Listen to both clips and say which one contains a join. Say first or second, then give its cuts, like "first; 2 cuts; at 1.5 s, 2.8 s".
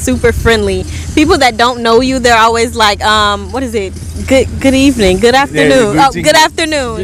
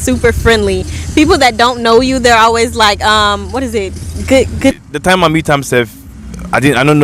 second; 1 cut; at 4.7 s